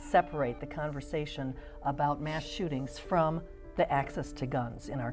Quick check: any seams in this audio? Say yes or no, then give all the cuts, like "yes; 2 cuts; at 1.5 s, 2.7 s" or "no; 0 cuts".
no; 0 cuts